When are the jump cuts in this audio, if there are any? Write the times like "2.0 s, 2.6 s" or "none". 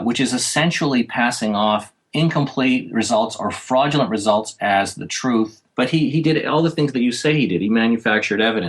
2.0 s, 5.6 s